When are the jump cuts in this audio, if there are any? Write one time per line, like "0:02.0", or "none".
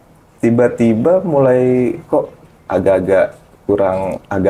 none

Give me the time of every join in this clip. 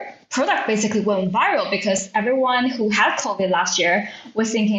none

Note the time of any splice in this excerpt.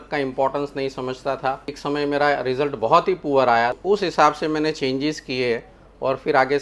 0:01.8
0:03.8

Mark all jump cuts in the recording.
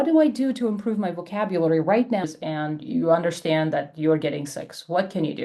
0:02.3

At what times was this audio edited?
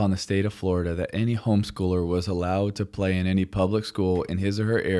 none

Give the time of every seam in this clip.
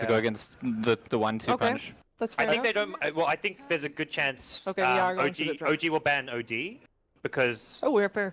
none

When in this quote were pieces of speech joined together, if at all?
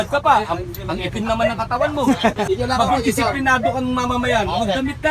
0:02.4

